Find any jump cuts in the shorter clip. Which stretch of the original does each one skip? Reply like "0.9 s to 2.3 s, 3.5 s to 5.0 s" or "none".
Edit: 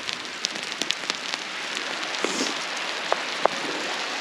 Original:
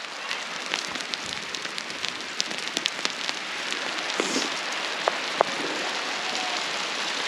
none